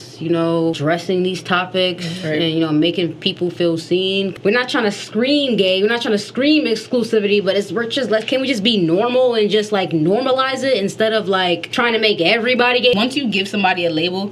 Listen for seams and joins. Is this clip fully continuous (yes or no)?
no